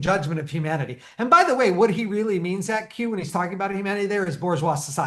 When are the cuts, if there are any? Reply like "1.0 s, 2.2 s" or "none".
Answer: none